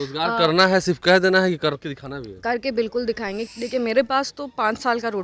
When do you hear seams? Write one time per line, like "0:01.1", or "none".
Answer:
0:03.5